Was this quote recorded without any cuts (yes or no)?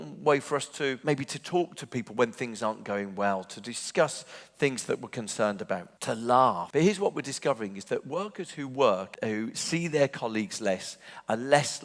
no